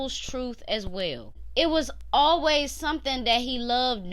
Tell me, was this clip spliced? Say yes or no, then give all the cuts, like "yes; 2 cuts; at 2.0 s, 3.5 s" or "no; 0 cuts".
yes; 1 cut; at 1.3 s